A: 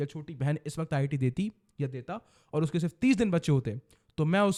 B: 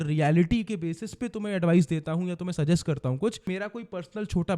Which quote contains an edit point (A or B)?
B